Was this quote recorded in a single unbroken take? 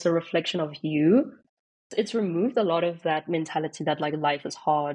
no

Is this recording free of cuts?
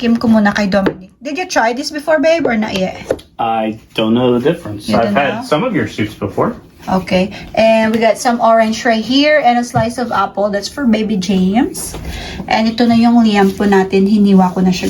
yes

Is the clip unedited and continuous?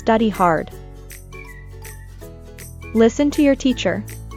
yes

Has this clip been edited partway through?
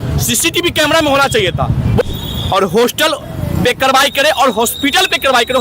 yes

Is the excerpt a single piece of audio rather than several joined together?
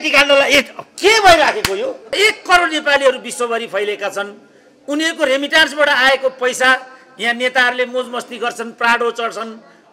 no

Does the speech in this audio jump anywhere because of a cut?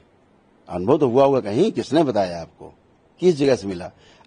no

